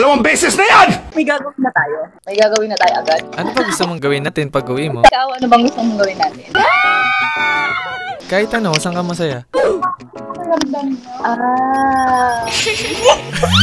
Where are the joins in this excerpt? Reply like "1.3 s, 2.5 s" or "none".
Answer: 1.0 s

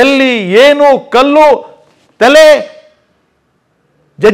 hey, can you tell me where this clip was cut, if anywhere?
none

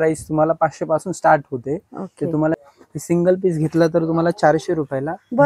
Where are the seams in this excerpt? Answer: 2.5 s

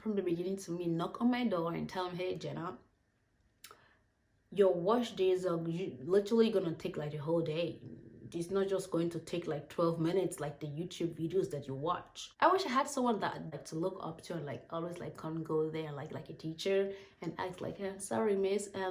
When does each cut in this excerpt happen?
12.2 s, 13.5 s

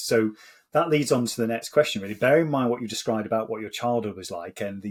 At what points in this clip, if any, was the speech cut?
none

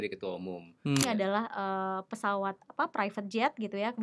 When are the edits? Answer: 1.0 s

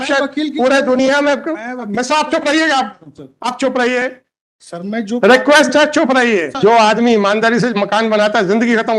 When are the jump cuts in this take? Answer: 6.5 s

